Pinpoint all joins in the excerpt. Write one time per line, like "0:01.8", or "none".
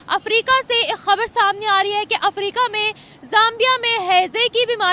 none